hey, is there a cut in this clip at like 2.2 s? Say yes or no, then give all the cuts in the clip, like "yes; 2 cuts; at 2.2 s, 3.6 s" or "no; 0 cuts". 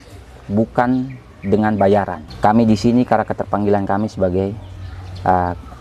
yes; 1 cut; at 2.2 s